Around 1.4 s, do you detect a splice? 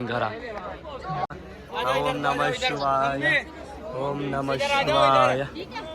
yes; 1 cut; at 1.4 s

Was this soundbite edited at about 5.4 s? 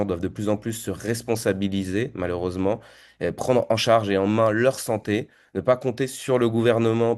no; 0 cuts

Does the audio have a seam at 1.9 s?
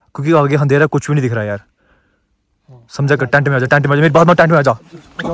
no; 0 cuts

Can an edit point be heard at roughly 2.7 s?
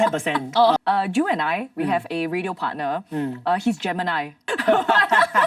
no; 2 cuts; at 0.8 s, 4.4 s

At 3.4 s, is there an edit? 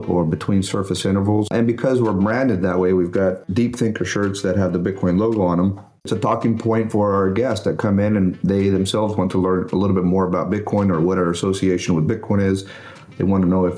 yes; 3 cuts; at 1.5 s, 3.4 s, 6.0 s

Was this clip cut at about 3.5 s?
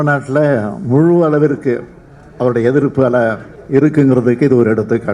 yes; 1 cut; at 3.5 s

